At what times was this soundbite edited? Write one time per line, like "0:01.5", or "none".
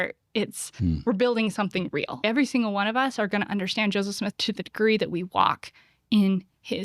0:02.2
0:04.3